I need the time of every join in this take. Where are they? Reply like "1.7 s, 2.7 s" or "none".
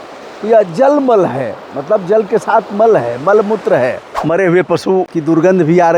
4.1 s